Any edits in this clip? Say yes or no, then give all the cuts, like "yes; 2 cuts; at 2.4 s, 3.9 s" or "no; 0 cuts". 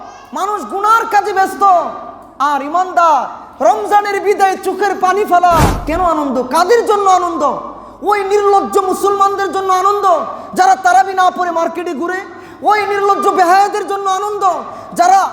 yes; 1 cut; at 5.8 s